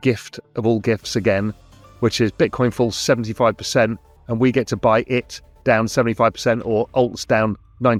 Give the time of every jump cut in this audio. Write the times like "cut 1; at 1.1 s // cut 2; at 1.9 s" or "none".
none

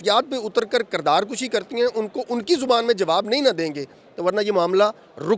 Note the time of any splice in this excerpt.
none

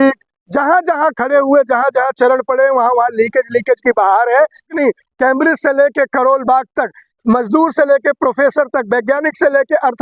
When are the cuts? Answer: cut 1; at 4.7 s

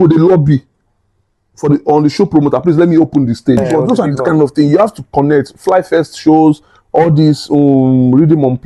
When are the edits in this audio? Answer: cut 1; at 3.6 s

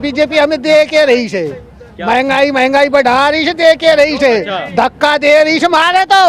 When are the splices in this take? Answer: none

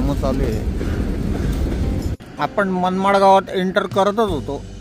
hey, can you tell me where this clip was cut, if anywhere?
cut 1; at 2.1 s

